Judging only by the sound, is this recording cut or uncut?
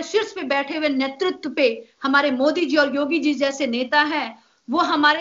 uncut